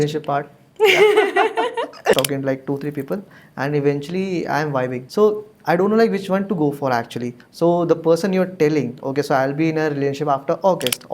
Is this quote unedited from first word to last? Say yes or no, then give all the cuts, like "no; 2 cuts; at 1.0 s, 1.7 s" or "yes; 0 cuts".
no; 1 cut; at 2.1 s